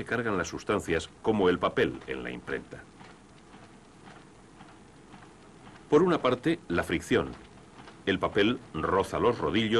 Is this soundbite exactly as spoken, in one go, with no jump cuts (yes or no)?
yes